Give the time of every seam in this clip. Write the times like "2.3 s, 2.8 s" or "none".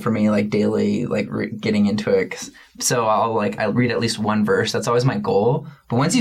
none